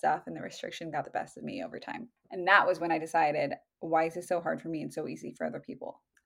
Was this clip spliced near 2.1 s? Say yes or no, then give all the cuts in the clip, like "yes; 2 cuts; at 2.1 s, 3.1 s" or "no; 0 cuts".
yes; 1 cut; at 2.1 s